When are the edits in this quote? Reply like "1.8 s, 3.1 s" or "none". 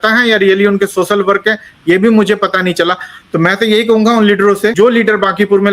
4.7 s